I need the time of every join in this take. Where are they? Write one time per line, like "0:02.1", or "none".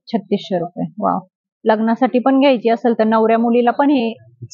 none